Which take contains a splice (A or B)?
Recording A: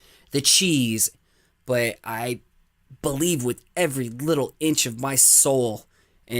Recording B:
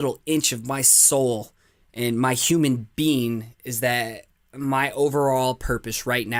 A